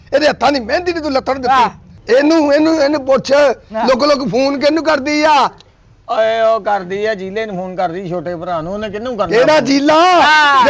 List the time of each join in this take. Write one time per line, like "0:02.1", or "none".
0:01.9